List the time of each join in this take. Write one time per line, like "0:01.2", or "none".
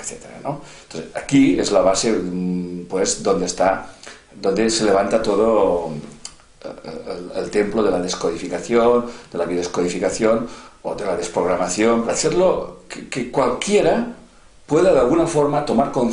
0:12.1